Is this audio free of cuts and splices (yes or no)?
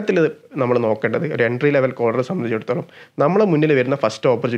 yes